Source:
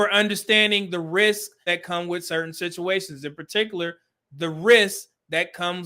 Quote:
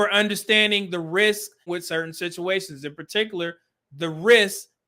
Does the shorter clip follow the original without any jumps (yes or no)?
no